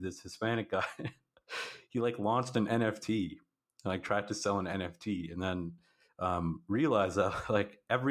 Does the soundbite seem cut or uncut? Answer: uncut